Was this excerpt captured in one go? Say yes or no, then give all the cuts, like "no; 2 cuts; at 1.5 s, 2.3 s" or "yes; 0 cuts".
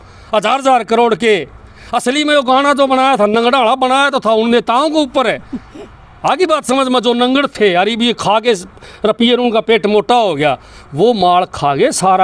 yes; 0 cuts